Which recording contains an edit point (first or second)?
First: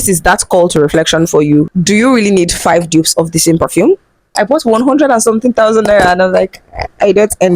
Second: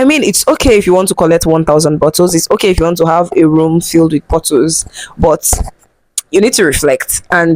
first